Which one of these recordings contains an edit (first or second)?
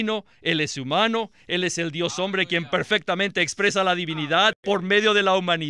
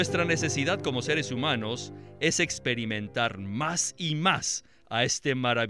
first